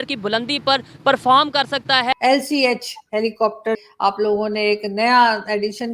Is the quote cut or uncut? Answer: cut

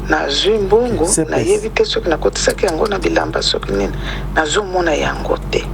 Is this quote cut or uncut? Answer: uncut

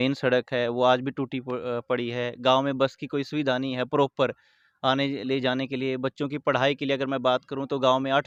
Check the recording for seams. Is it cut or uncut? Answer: uncut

